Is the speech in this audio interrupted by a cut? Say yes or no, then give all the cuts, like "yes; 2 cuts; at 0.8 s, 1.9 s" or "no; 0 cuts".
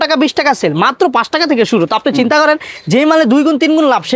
no; 0 cuts